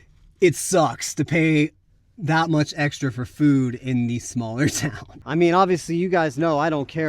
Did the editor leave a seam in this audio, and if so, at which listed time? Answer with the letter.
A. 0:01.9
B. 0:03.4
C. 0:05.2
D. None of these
C